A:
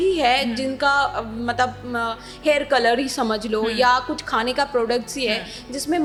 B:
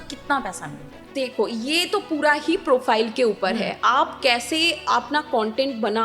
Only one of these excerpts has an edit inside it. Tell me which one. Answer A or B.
B